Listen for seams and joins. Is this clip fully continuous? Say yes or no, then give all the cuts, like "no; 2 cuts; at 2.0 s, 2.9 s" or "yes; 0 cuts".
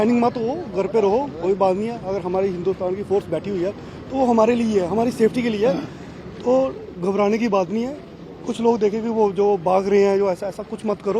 yes; 0 cuts